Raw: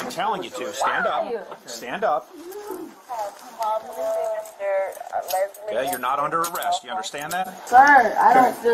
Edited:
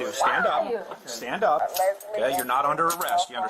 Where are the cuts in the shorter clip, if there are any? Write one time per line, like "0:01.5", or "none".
0:01.6